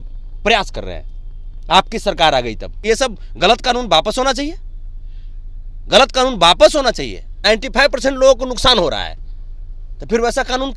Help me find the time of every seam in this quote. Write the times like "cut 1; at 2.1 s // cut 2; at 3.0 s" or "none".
cut 1; at 2.7 s // cut 2; at 7.3 s